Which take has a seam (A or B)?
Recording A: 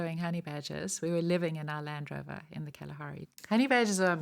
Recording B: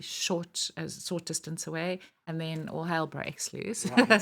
A